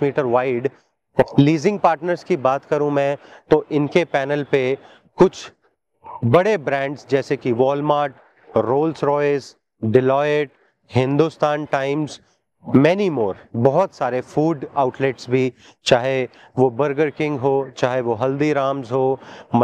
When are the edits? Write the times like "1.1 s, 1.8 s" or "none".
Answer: 1.2 s